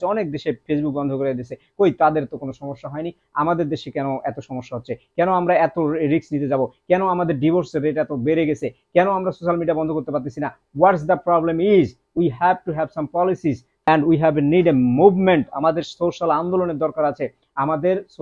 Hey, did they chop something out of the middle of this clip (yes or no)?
yes